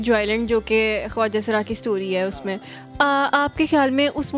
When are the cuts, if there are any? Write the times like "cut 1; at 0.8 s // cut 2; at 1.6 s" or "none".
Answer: none